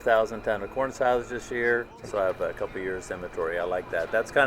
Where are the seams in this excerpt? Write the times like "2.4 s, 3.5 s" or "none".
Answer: 2.0 s